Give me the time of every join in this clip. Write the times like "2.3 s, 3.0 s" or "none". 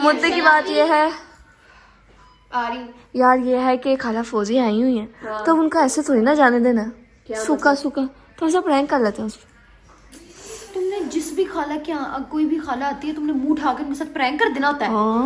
none